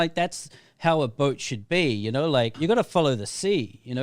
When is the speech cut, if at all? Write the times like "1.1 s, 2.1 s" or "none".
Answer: 2.5 s